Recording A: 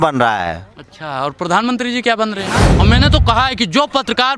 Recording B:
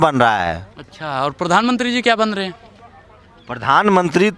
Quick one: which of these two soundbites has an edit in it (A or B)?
A